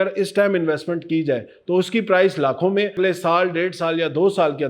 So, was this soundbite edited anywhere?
yes; 1 cut; at 2.9 s

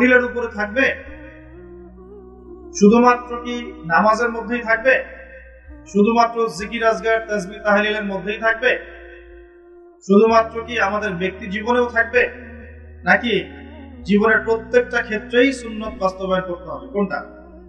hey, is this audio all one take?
yes; 0 cuts

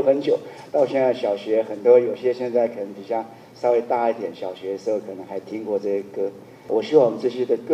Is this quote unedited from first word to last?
no; 1 cut; at 6.6 s

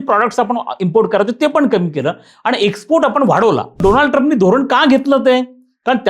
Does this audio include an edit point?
yes; 1 cut; at 3.8 s

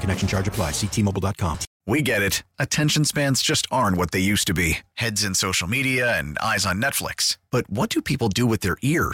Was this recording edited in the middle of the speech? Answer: yes; 1 cut; at 1.7 s

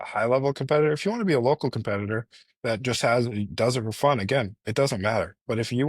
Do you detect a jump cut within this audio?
no; 0 cuts

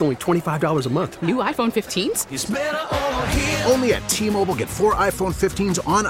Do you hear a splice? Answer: no; 0 cuts

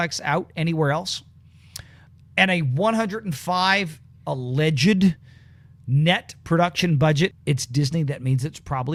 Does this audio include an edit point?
no; 0 cuts

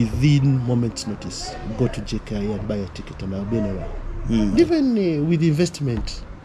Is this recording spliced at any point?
yes; 1 cut; at 4.5 s

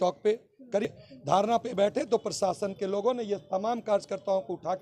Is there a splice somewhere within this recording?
yes; 1 cut; at 0.9 s

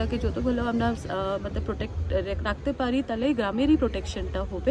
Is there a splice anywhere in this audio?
no; 0 cuts

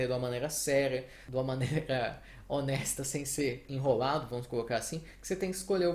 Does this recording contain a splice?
no; 0 cuts

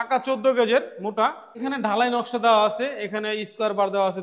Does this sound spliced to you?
yes; 1 cut; at 1.6 s

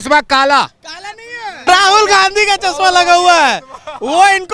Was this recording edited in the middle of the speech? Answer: yes; 1 cut; at 1.7 s

